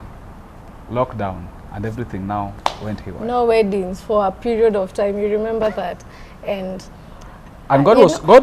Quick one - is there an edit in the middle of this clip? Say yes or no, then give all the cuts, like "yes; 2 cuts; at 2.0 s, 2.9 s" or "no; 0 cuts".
no; 0 cuts